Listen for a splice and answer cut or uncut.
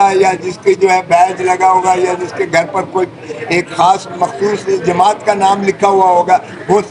uncut